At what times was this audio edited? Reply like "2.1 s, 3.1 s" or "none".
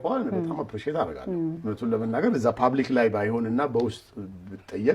1.6 s